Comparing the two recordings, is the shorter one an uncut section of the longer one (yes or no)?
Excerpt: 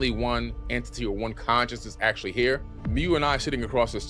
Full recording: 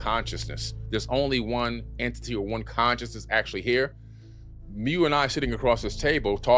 no